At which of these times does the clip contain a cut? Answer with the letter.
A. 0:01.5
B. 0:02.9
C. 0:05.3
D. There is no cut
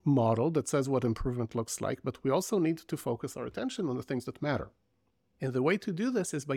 D